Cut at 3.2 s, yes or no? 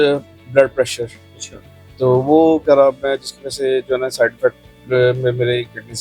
no